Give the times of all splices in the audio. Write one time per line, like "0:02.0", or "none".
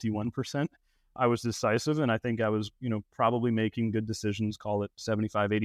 none